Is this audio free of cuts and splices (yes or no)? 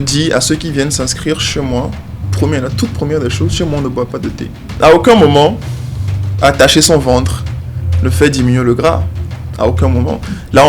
no